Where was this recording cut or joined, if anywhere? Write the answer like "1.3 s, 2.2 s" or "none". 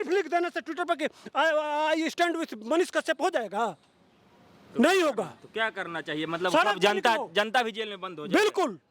none